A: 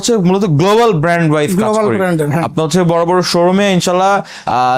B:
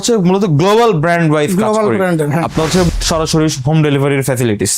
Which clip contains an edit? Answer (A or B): B